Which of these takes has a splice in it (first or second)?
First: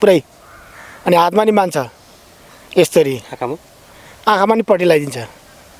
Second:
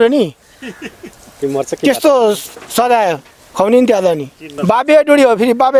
second